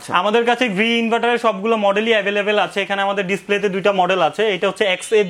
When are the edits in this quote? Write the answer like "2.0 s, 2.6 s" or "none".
none